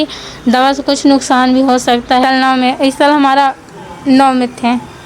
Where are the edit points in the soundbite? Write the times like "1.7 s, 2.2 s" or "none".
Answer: 2.2 s